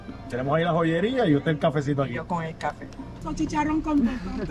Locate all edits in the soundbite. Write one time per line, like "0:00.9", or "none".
0:03.2